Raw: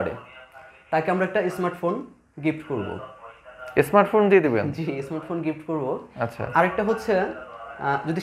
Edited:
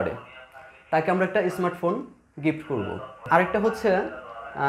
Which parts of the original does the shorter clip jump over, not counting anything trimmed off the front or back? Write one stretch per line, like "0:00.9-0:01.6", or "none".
0:03.2-0:06.4